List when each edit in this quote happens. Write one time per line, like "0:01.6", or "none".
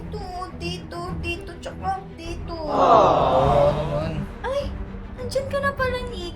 none